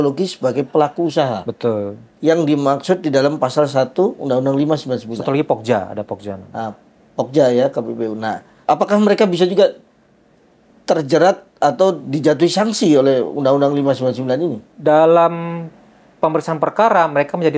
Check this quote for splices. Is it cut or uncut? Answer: uncut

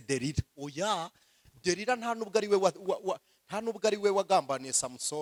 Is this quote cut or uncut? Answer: uncut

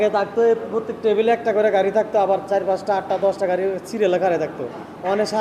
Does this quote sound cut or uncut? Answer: uncut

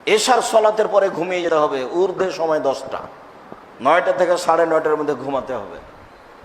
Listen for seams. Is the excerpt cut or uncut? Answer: cut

